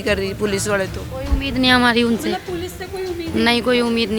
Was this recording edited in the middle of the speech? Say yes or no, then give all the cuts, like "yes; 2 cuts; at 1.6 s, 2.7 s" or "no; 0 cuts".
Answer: no; 0 cuts